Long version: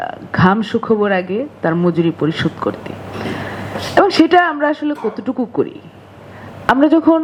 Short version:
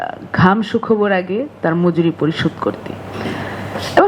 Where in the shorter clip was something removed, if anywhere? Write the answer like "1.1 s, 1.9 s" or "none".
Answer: none